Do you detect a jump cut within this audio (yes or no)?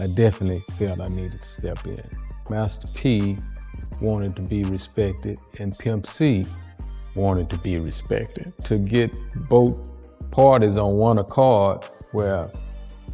no